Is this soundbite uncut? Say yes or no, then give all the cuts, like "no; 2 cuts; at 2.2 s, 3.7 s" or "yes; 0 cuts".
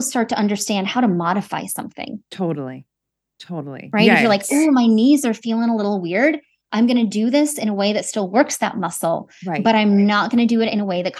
yes; 0 cuts